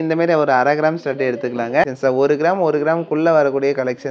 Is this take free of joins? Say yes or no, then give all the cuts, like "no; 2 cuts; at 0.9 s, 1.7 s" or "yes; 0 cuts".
no; 1 cut; at 1.9 s